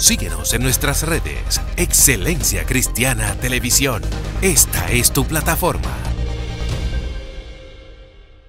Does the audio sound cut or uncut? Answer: uncut